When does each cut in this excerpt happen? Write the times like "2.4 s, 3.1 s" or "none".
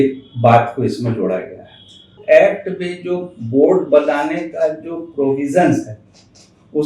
2.2 s